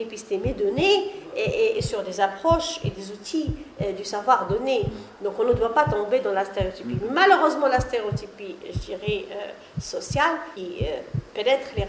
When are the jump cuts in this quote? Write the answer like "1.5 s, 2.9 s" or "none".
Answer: 10.5 s